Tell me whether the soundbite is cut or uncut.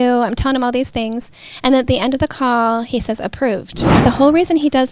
cut